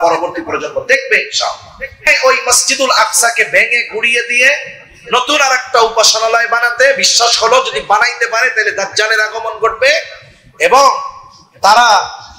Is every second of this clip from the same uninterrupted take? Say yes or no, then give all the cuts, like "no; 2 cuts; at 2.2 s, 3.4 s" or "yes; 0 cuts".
no; 1 cut; at 2.1 s